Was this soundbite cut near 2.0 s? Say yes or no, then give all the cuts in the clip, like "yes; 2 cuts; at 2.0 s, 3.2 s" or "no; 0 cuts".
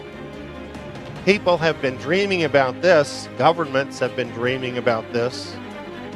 no; 1 cut; at 4.2 s